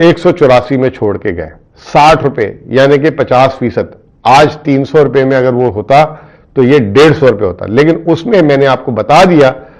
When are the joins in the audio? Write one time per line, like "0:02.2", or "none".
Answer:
none

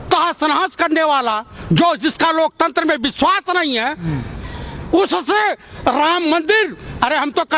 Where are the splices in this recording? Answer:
none

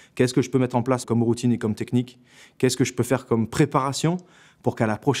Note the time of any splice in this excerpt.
0:01.0

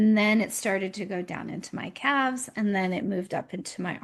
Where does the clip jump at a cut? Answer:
none

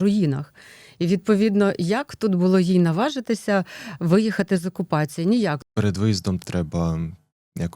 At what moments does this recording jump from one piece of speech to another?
0:05.6
0:06.4

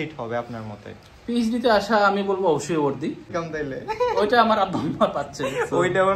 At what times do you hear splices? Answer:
0:03.3

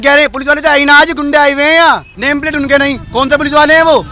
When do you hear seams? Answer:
0:02.1

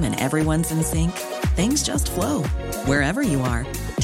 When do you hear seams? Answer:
none

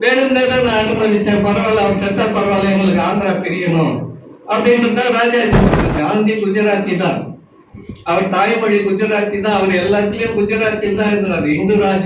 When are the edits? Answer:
0:05.7

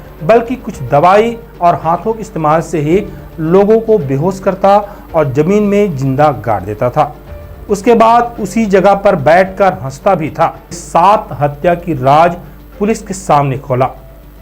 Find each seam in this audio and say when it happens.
0:10.8

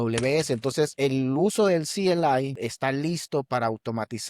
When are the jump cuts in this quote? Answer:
0:00.9
0:02.5

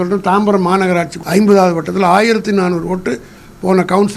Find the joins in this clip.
0:01.2

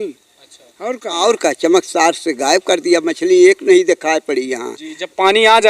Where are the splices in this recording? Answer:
0:01.1

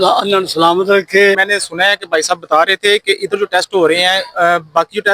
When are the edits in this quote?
0:01.4

